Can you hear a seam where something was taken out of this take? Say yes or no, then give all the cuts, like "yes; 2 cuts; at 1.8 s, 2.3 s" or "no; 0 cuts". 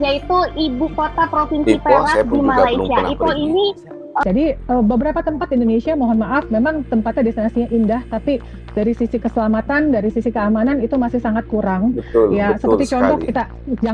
yes; 1 cut; at 4.2 s